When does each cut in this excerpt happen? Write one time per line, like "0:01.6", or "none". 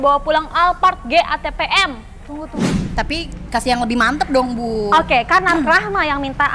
0:02.6